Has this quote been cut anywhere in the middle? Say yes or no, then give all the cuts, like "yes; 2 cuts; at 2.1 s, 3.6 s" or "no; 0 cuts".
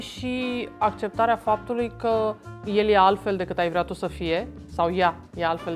yes; 1 cut; at 2.5 s